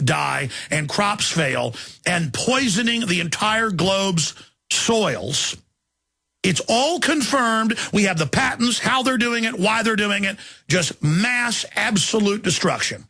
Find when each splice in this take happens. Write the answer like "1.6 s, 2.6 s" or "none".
12.1 s